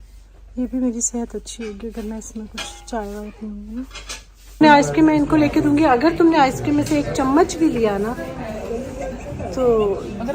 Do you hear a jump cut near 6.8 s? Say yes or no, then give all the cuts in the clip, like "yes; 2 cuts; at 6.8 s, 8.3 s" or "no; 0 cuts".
no; 1 cut; at 4.6 s